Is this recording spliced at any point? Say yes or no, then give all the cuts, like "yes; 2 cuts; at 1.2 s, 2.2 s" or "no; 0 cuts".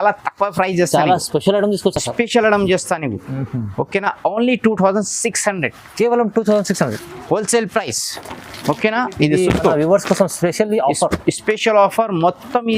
no; 0 cuts